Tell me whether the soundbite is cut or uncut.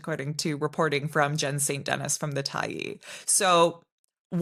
uncut